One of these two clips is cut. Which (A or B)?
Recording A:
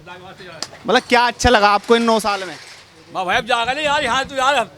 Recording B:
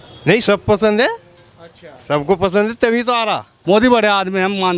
B